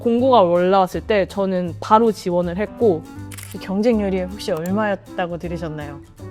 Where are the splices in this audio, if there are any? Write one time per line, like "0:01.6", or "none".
none